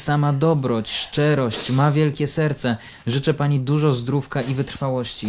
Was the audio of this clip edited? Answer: no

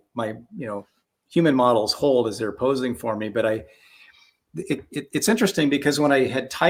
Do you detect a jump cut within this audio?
no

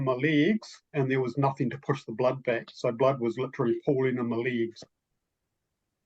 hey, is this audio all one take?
yes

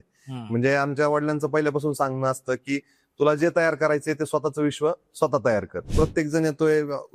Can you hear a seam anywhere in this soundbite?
yes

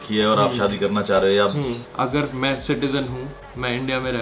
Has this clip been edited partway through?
yes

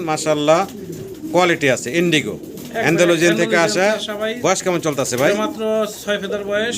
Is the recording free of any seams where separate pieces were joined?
yes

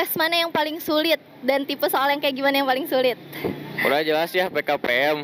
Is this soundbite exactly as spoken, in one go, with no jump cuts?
yes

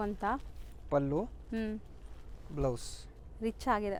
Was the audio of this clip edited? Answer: no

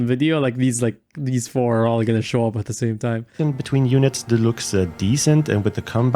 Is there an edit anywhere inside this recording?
yes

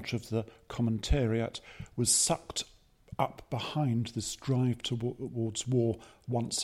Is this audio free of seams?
yes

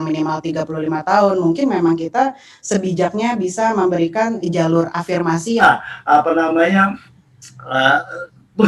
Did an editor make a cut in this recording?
yes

